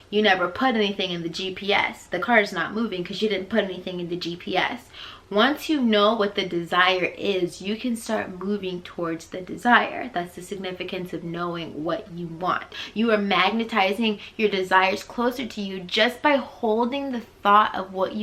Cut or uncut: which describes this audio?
cut